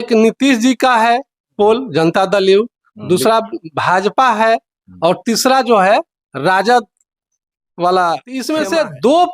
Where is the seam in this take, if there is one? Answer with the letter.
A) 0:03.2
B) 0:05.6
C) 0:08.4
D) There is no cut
C